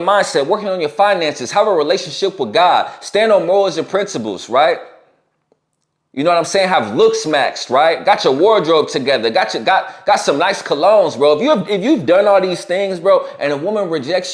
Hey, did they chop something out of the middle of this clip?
no; 0 cuts

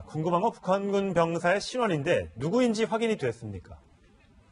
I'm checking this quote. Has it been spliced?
no; 0 cuts

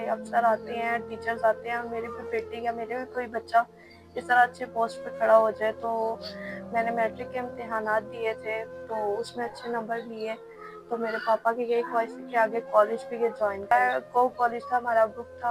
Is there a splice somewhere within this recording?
yes; 1 cut; at 13.7 s

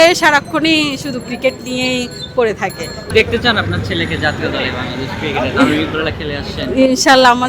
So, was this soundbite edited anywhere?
yes; 1 cut; at 3.0 s

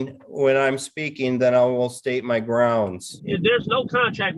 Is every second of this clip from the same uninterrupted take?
no; 1 cut; at 3.1 s

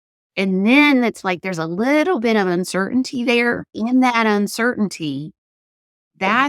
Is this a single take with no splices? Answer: no; 1 cut; at 3.7 s

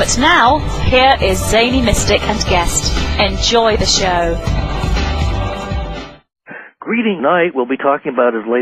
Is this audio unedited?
yes; 0 cuts

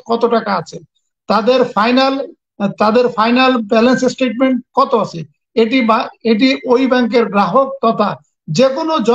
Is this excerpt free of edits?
yes; 0 cuts

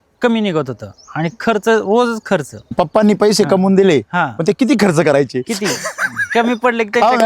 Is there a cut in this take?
yes; 1 cut; at 2.7 s

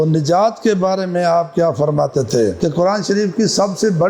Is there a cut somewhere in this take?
yes; 1 cut; at 2.6 s

